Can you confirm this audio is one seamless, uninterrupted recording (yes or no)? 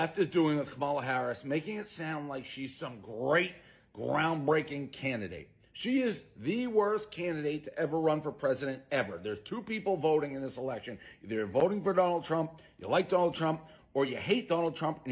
yes